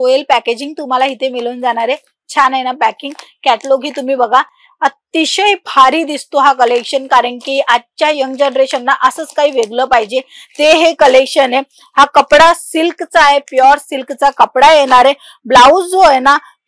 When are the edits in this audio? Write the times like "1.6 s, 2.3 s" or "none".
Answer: none